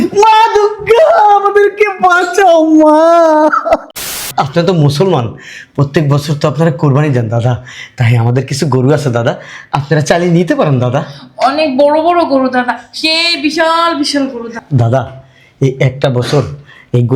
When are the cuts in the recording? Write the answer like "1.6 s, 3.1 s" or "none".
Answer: 4.0 s